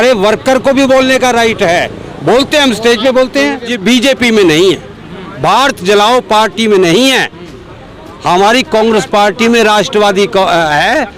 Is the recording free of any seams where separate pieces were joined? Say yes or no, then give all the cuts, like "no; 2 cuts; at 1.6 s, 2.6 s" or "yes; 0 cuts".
no; 1 cut; at 3.7 s